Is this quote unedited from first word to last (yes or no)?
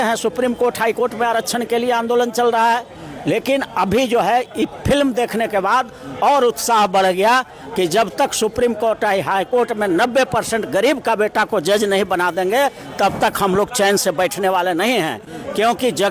yes